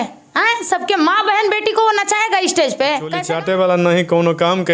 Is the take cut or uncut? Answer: cut